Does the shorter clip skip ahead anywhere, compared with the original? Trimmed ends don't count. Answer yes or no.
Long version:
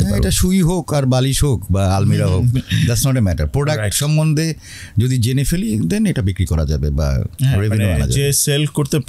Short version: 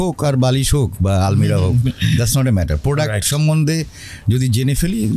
no